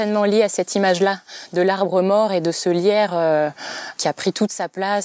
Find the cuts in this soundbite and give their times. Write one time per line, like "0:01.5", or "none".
none